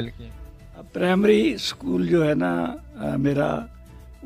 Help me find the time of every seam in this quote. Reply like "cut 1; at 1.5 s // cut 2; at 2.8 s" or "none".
cut 1; at 0.9 s